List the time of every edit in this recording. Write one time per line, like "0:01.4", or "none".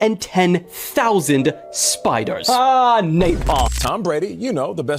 0:03.7